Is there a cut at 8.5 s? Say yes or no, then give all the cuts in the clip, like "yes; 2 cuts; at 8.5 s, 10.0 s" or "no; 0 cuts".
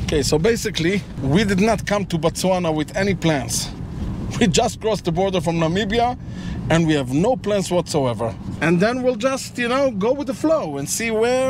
yes; 2 cuts; at 1.1 s, 8.5 s